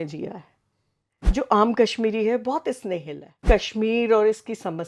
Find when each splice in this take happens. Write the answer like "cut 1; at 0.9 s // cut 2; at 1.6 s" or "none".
cut 1; at 1.4 s // cut 2; at 3.4 s